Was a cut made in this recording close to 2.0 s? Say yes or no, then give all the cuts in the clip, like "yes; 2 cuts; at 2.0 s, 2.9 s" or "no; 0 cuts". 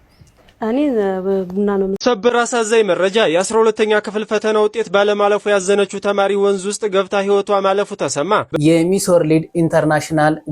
yes; 2 cuts; at 2.0 s, 8.6 s